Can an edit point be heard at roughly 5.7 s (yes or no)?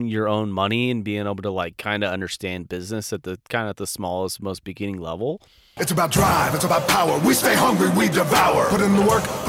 yes